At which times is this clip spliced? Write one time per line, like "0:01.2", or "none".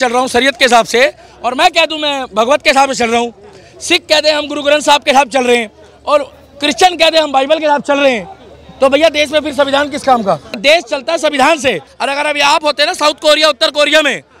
0:10.6
0:11.9